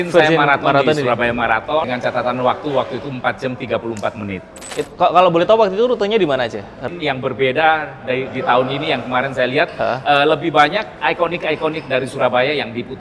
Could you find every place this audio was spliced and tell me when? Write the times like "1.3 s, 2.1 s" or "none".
1.9 s, 4.7 s, 6.9 s, 10.9 s